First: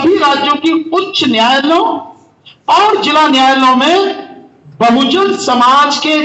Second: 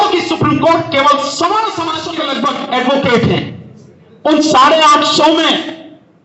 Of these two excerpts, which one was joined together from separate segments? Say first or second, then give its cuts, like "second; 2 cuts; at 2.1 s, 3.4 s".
second; 1 cut; at 2.1 s